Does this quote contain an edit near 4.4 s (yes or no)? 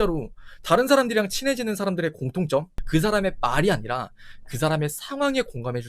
no